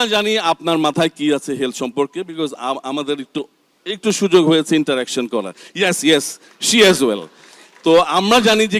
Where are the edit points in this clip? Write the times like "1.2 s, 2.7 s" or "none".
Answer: none